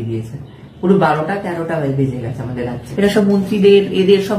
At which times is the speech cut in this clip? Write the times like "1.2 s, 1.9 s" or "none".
2.8 s